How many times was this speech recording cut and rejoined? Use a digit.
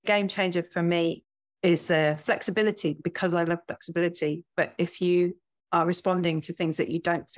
2